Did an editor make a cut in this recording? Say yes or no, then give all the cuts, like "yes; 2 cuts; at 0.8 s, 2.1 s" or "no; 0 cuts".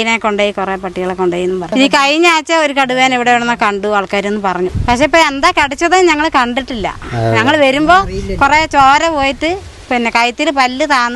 yes; 2 cuts; at 1.7 s, 4.8 s